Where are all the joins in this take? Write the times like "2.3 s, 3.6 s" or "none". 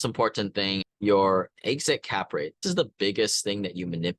0.9 s, 2.6 s